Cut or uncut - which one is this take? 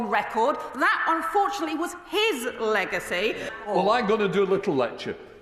cut